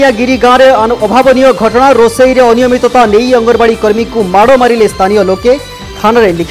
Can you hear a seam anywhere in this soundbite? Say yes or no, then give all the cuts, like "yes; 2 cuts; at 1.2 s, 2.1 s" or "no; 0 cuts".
no; 0 cuts